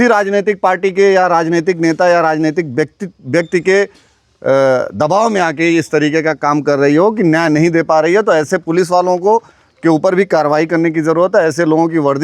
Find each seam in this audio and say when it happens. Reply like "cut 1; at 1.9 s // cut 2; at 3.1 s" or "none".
none